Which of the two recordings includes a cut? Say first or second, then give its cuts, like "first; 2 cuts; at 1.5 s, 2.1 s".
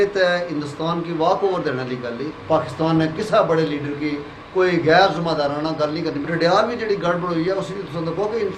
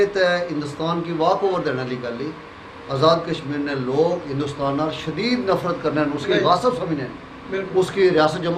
first; 2 cuts; at 2.3 s, 6.3 s